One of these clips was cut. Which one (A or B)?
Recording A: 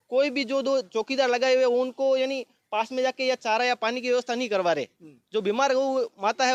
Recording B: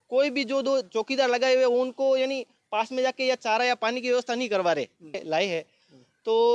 B